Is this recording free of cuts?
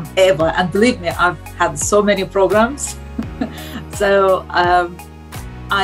yes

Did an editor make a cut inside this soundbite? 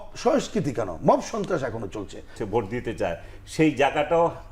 yes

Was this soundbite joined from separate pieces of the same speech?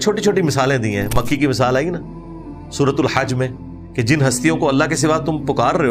no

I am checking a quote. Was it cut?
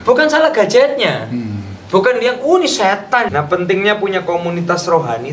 yes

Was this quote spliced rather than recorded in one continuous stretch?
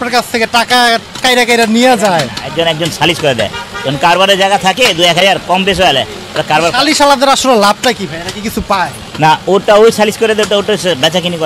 no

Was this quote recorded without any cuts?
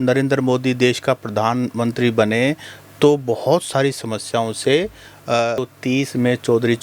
no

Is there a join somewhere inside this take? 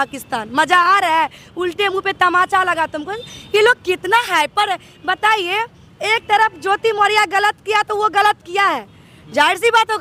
no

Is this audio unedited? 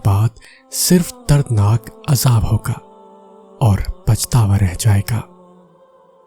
no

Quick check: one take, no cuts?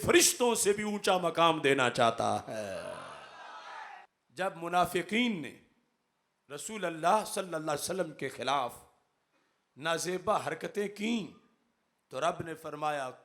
no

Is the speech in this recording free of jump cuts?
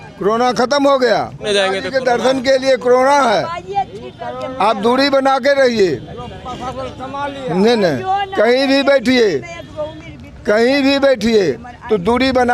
no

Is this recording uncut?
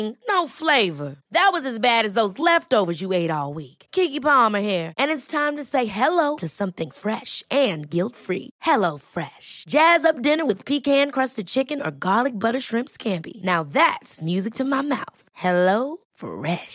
yes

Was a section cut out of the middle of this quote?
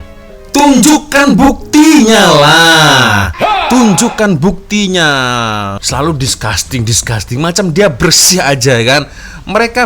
yes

